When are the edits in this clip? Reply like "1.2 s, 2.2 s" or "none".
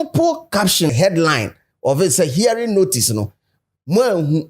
0.9 s